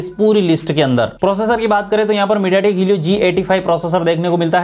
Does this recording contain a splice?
no; 0 cuts

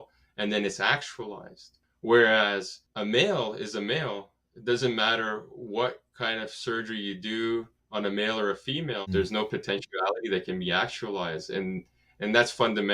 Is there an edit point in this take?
yes; 2 cuts; at 7.8 s, 9.1 s

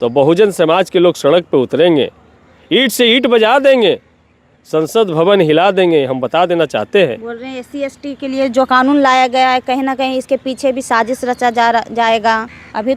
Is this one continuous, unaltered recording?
yes; 0 cuts

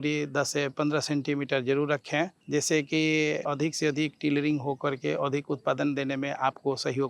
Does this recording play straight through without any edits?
no; 2 cuts; at 2.4 s, 3.4 s

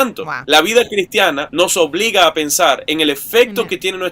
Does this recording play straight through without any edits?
yes; 0 cuts

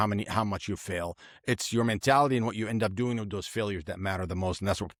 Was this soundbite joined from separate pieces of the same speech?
no; 0 cuts

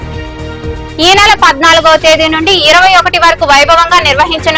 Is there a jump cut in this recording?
yes; 1 cut; at 0.9 s

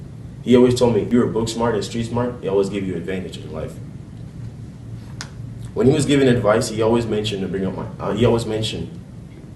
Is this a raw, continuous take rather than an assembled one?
no; 1 cut; at 1.1 s

